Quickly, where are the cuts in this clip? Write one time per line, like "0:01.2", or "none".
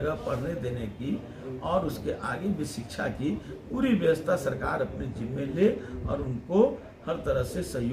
none